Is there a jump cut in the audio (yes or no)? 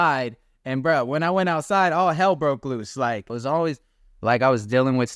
yes